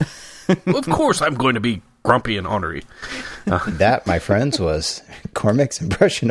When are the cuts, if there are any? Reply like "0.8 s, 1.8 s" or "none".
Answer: 3.8 s